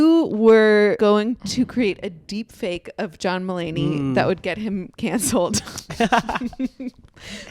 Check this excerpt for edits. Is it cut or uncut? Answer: cut